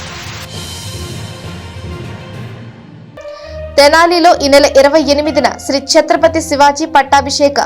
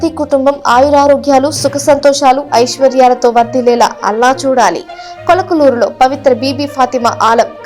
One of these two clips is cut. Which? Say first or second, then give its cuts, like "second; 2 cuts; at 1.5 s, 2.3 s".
first; 1 cut; at 3.0 s